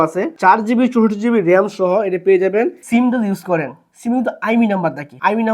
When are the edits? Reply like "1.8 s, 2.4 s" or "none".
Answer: 2.8 s